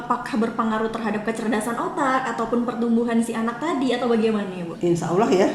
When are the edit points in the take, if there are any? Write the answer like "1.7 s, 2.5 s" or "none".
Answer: none

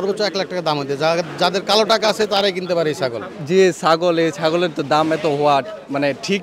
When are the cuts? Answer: 3.3 s

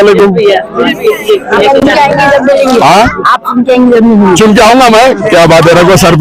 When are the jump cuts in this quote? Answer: none

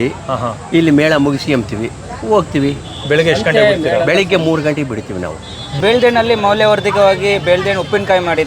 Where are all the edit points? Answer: 5.8 s

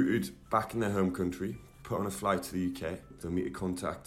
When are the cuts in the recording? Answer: 3.2 s

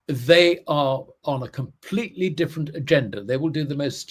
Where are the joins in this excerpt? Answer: none

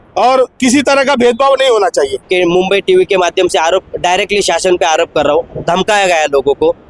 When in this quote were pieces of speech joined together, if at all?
2.2 s

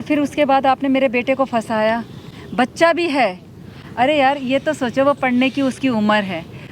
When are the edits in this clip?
none

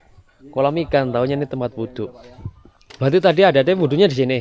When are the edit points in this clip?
none

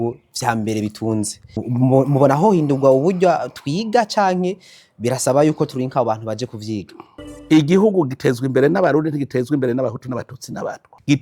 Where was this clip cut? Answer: 7.4 s

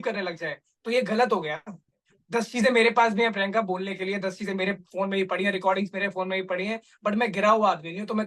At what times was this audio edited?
2.1 s

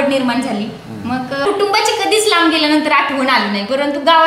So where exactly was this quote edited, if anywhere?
1.5 s

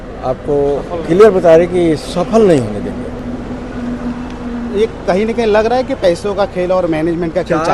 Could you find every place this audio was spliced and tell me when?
none

